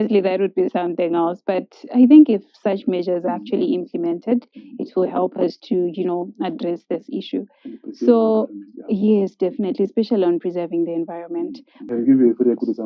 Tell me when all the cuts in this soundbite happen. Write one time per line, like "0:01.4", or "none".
0:11.7